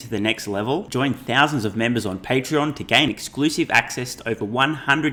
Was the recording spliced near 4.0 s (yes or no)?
no